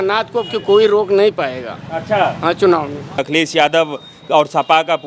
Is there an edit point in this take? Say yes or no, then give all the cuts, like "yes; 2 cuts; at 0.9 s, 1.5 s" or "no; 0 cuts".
yes; 1 cut; at 3.2 s